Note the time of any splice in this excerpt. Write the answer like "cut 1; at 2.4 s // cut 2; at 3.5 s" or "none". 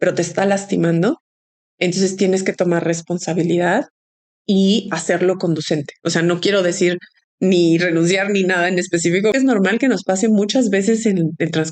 cut 1; at 9.3 s